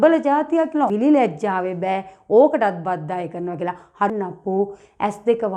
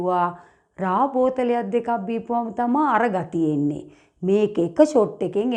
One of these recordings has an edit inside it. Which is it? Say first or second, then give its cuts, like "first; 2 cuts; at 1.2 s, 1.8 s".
first; 2 cuts; at 0.9 s, 4.1 s